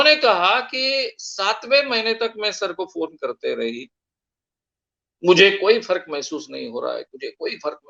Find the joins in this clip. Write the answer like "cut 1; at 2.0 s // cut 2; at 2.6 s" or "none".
none